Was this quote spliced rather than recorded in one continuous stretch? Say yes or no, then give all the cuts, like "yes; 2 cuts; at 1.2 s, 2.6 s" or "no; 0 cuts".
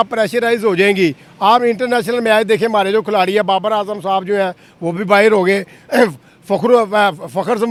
no; 0 cuts